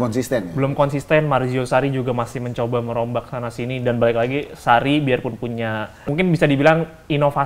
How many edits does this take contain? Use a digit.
1